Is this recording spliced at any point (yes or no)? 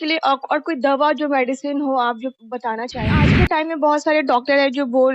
yes